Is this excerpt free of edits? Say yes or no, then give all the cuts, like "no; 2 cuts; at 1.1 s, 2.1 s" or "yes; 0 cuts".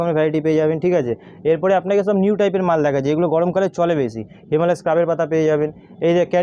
yes; 0 cuts